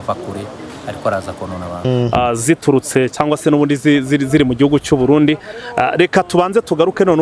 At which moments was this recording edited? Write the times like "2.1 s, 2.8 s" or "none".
1.8 s